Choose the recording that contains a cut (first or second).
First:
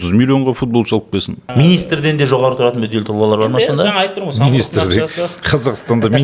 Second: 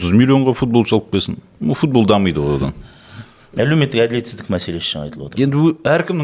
first